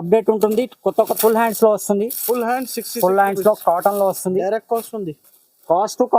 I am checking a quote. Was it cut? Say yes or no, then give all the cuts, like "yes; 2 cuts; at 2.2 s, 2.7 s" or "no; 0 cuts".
yes; 1 cut; at 1.1 s